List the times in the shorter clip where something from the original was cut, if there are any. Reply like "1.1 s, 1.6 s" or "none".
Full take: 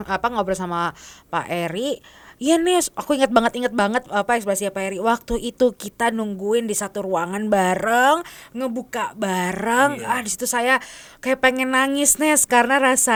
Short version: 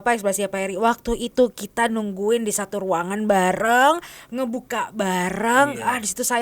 none